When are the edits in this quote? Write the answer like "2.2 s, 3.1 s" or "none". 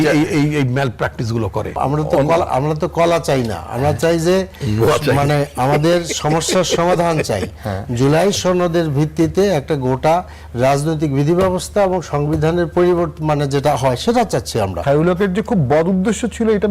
1.7 s, 14.8 s